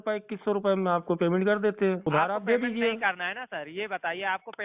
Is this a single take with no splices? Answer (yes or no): no